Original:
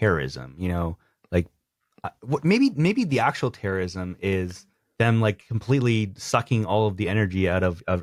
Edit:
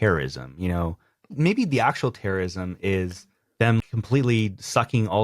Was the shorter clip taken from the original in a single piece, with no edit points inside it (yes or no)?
no